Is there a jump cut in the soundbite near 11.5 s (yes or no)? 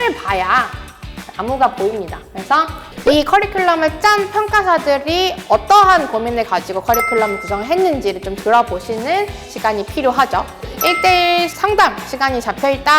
yes